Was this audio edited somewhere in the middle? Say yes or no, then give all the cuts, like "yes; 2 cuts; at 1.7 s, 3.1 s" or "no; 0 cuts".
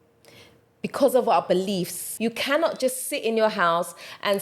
yes; 1 cut; at 2.0 s